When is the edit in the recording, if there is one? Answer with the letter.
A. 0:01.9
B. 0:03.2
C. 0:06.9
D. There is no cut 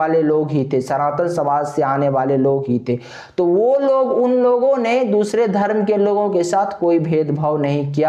D